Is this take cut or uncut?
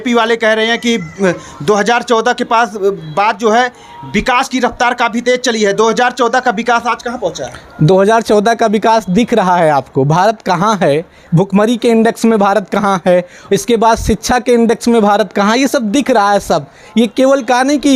uncut